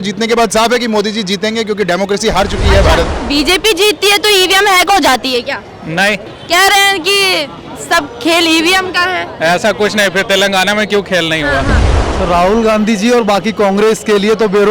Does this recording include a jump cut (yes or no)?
yes